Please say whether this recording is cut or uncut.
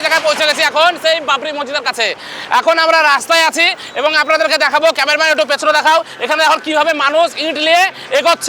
uncut